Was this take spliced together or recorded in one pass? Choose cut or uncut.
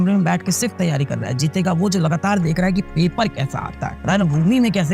uncut